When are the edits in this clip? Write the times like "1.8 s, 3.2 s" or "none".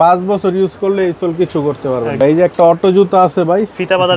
2.2 s

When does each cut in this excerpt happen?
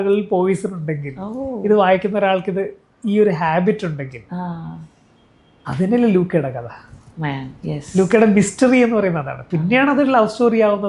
none

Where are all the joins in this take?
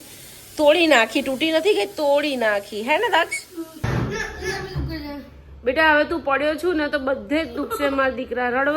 3.8 s

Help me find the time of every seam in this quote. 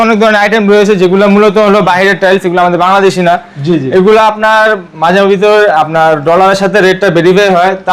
none

